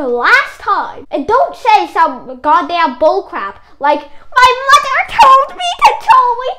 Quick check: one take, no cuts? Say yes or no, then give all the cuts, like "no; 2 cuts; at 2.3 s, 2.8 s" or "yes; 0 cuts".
no; 1 cut; at 1.0 s